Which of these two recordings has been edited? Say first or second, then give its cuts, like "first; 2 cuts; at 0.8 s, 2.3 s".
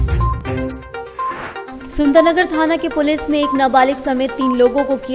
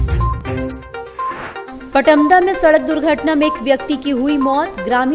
second; 1 cut; at 1.7 s